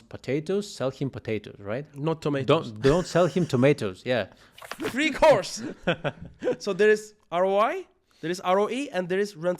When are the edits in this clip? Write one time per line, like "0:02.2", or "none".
0:04.7

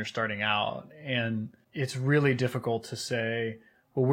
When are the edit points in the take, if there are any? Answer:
0:01.6

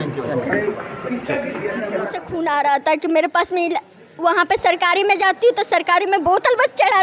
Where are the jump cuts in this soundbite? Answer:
0:02.2

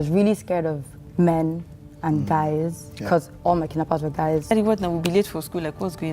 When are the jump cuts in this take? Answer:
0:00.9
0:04.5

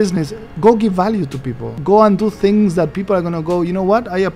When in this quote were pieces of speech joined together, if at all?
0:01.7

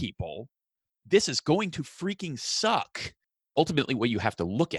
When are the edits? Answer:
0:03.5

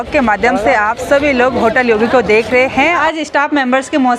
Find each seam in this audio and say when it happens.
0:03.0

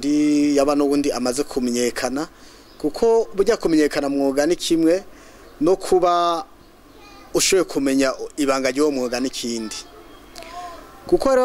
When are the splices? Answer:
none

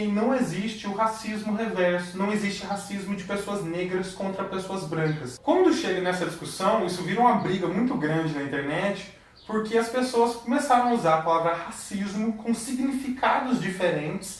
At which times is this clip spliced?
0:10.4

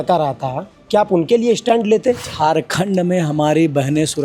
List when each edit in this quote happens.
0:02.2

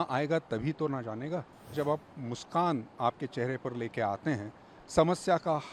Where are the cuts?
0:01.7

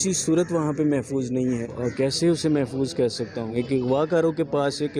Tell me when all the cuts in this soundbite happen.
0:01.7
0:03.5

